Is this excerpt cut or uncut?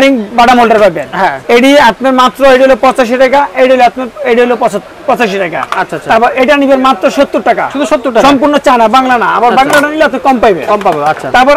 uncut